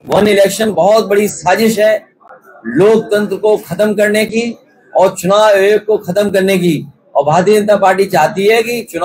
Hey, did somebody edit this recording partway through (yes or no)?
no